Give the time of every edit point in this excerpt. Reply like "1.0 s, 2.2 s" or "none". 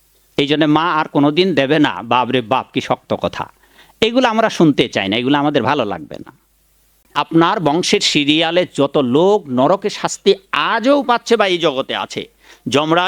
7.0 s